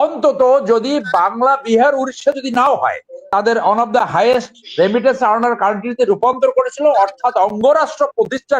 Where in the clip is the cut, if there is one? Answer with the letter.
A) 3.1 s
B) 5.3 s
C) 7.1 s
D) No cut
A